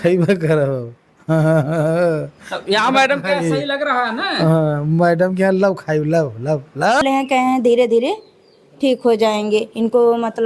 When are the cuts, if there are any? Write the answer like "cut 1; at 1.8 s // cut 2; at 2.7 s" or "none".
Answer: cut 1; at 7.0 s